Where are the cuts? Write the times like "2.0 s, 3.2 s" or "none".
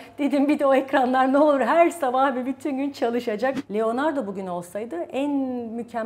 3.6 s

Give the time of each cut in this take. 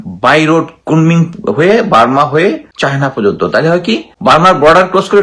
2.7 s, 4.1 s

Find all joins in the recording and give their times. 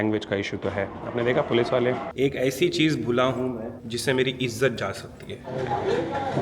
2.1 s, 5.5 s

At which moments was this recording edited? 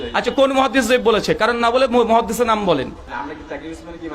3.0 s

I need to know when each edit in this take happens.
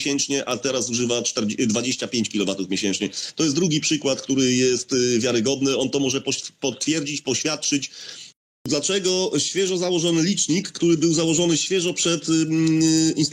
8.6 s

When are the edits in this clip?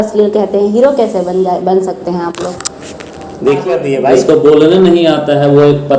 3.6 s

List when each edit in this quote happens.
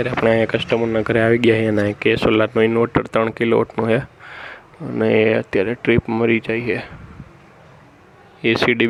none

